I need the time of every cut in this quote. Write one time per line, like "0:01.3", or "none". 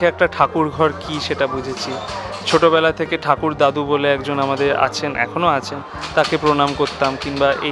none